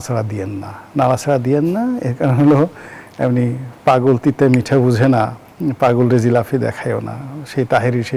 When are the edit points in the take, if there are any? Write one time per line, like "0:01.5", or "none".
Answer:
none

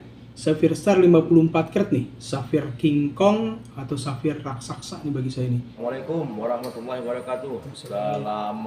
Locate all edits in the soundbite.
0:05.8

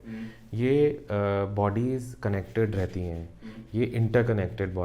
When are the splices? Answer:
none

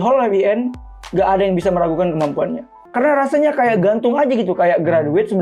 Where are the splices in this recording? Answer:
0:02.8

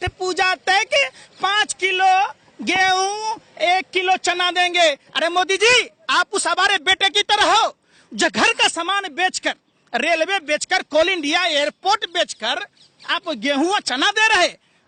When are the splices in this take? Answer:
none

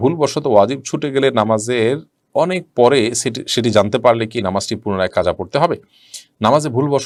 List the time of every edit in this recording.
none

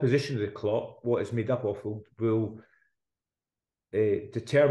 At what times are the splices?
none

